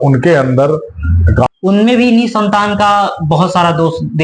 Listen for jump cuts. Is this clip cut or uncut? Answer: cut